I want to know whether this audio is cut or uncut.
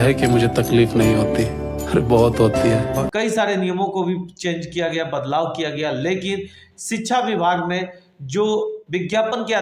cut